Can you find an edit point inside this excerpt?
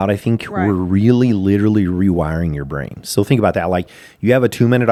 no; 0 cuts

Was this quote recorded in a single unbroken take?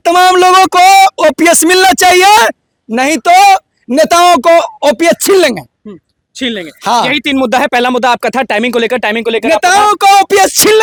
yes; 0 cuts

